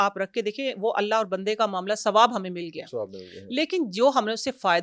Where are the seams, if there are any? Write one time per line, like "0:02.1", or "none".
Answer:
none